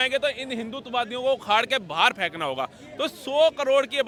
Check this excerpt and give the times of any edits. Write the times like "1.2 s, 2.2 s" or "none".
none